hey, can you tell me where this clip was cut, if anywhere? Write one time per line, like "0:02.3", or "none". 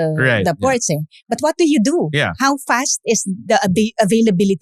none